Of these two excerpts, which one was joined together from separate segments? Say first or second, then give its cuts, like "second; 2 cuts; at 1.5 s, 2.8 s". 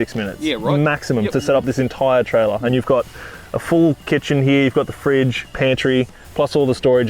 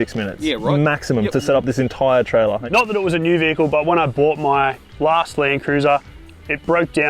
second; 2 cuts; at 2.6 s, 4.8 s